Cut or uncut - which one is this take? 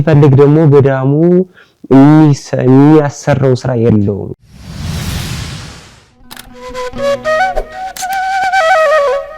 cut